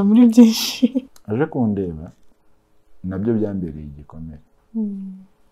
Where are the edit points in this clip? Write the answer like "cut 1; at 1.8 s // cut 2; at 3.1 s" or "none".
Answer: cut 1; at 1.1 s